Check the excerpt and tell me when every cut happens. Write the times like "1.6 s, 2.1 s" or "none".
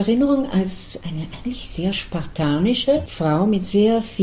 1.0 s, 3.1 s